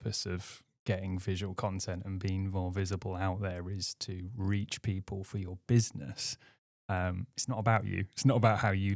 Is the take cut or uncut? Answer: uncut